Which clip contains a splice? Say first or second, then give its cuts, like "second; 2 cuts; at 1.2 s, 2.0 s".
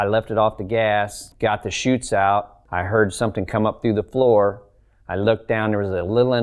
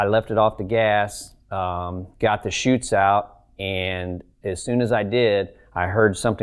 first; 2 cuts; at 1.2 s, 2.6 s